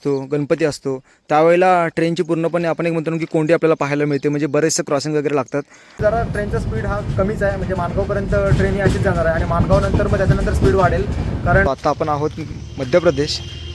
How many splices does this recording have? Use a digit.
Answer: 2